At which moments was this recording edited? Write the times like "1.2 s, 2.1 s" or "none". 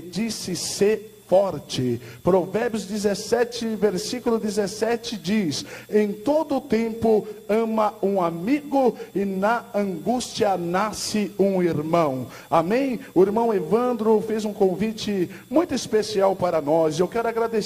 11.1 s